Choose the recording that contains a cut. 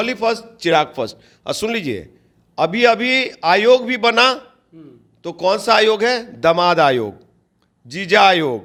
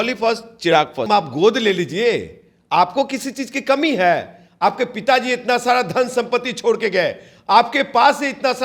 second; 1 cut; at 1.1 s

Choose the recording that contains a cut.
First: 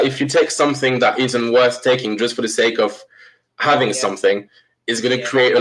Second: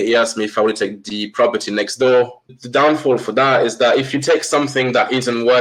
second; 1 cut; at 2.5 s

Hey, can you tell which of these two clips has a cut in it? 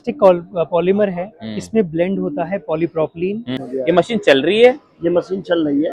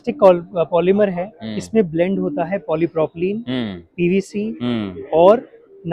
first; 1 cut; at 3.6 s

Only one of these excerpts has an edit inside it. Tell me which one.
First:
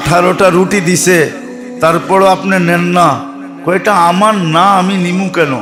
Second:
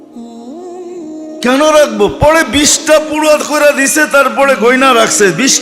second; 1 cut; at 1.4 s

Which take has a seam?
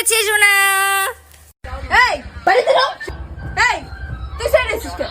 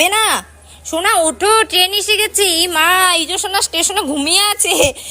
first; 1 cut; at 1.6 s

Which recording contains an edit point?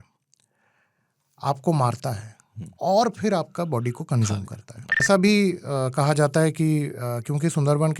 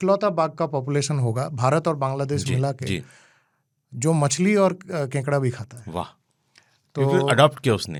first; 1 cut; at 5.0 s

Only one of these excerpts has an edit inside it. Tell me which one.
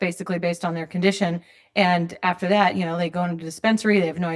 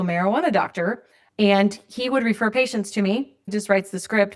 second; 2 cuts; at 1.2 s, 3.5 s

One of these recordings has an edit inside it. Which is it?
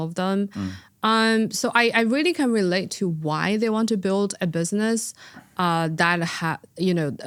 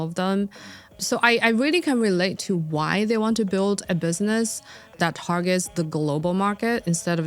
second; 2 cuts; at 1.0 s, 4.9 s

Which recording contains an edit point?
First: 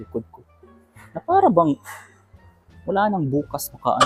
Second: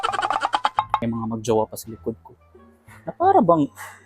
second; 1 cut; at 1.0 s

